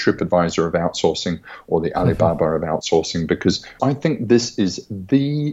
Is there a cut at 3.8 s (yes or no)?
yes